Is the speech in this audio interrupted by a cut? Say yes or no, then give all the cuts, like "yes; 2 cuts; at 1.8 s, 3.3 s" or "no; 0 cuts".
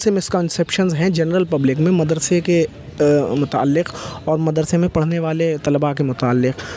no; 0 cuts